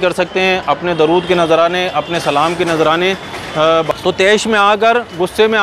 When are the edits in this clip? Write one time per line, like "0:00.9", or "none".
0:03.9